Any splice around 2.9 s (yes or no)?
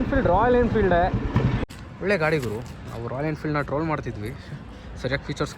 no